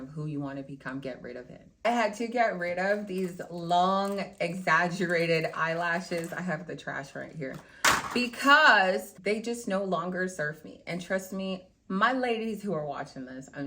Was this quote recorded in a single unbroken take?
no; 1 cut; at 1.8 s

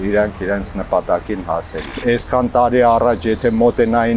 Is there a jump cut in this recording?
yes; 1 cut; at 2.0 s

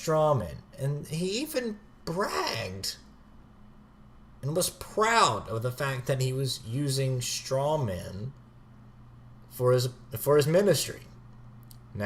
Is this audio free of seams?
yes; 0 cuts

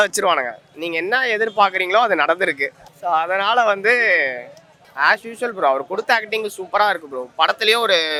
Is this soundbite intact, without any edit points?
yes; 0 cuts

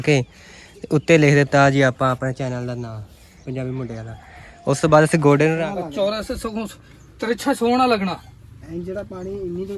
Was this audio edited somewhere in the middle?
yes; 1 cut; at 5.5 s

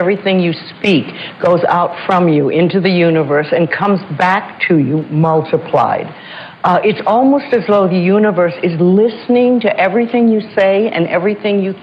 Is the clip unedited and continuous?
yes; 0 cuts

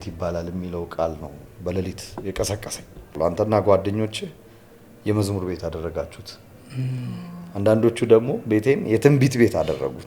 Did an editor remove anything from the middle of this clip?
yes; 1 cut; at 3.1 s

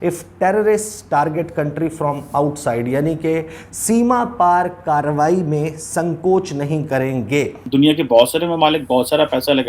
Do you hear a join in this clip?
yes; 1 cut; at 7.6 s

